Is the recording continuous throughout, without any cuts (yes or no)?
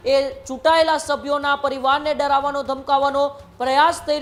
yes